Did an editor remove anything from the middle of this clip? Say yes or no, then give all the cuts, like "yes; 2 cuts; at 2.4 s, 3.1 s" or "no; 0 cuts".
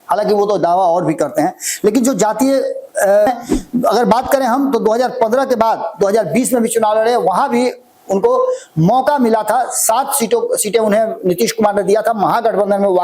yes; 1 cut; at 3.3 s